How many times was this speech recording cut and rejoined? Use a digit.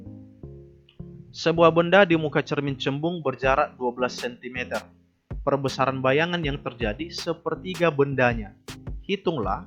1